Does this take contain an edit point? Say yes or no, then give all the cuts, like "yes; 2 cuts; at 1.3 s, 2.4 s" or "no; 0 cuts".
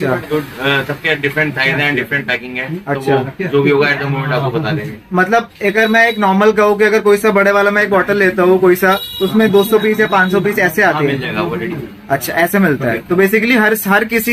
no; 0 cuts